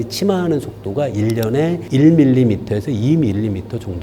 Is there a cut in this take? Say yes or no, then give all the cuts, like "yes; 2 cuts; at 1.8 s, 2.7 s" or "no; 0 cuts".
no; 0 cuts